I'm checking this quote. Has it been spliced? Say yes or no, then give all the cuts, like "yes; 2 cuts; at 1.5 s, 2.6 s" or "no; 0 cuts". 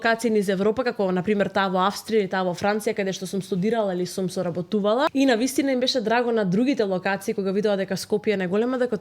yes; 1 cut; at 5.1 s